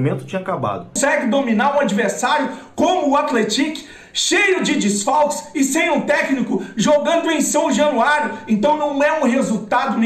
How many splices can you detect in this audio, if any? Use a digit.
1